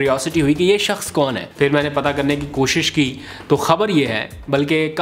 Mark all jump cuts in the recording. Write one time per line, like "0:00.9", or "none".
0:01.4